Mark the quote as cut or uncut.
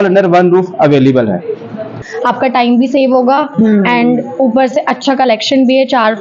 cut